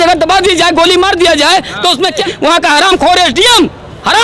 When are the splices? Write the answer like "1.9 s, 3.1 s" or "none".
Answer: 2.2 s